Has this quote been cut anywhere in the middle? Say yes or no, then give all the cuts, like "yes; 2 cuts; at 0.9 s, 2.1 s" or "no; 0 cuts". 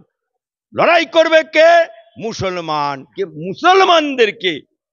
yes; 1 cut; at 3.0 s